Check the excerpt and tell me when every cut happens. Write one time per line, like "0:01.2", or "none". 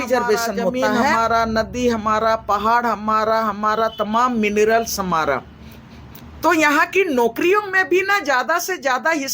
0:00.9